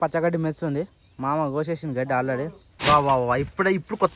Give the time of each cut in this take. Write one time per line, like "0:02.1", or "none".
0:02.6